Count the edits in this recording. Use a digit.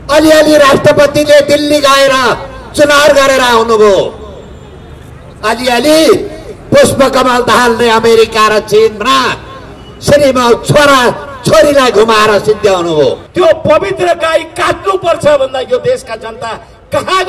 1